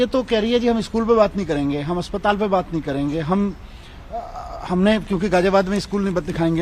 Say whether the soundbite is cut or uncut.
uncut